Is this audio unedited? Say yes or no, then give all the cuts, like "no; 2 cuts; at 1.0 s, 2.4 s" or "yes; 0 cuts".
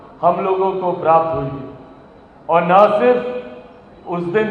yes; 0 cuts